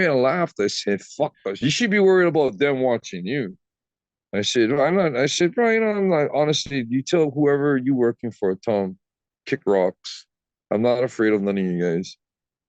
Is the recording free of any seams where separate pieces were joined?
no; 1 cut; at 1.4 s

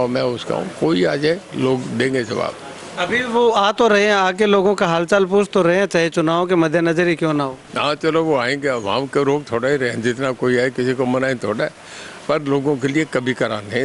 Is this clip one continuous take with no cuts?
yes; 0 cuts

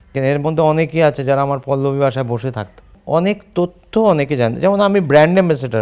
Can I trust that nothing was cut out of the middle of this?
no; 1 cut; at 2.9 s

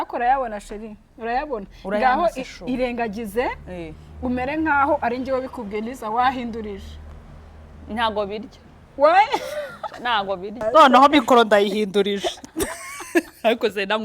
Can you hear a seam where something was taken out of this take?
yes; 1 cut; at 10.6 s

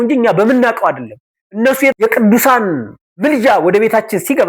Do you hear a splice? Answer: yes; 1 cut; at 1.9 s

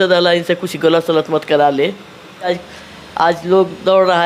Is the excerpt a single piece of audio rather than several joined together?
no; 1 cut; at 2.5 s

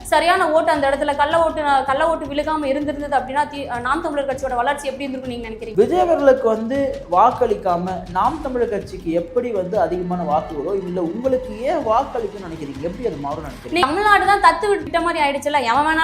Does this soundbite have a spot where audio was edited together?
yes; 3 cuts; at 5.6 s, 13.8 s, 14.8 s

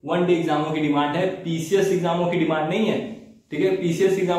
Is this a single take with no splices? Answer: yes; 0 cuts

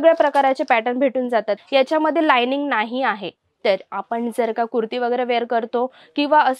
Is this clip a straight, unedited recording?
no; 1 cut; at 1.6 s

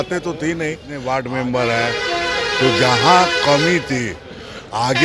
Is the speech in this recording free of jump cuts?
no; 1 cut; at 0.9 s

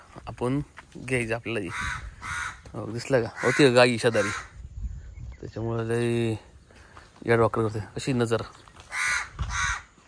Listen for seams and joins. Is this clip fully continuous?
yes; 0 cuts

